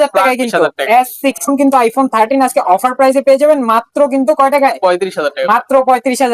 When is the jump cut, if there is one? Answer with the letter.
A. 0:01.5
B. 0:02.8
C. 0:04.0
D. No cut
A